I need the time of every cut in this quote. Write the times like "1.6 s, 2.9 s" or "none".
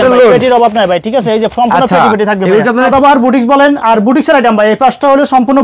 2.9 s